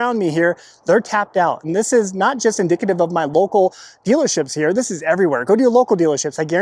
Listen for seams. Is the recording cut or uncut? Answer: uncut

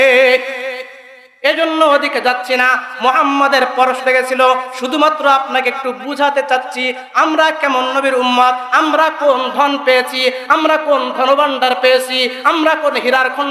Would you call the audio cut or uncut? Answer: uncut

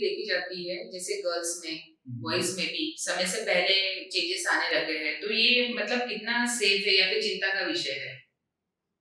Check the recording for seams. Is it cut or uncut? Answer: uncut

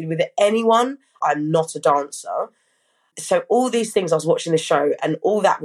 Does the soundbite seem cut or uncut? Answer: cut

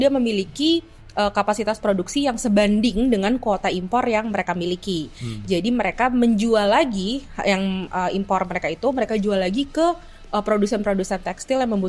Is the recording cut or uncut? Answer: uncut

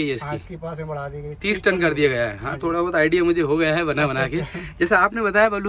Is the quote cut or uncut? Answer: uncut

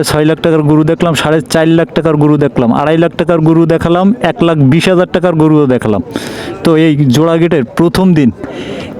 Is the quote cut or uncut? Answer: uncut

